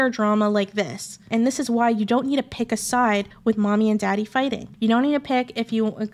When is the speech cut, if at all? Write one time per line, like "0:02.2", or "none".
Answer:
0:01.3
0:03.3
0:04.7